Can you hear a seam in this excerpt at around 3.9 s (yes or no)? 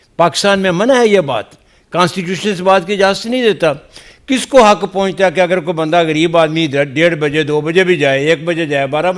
no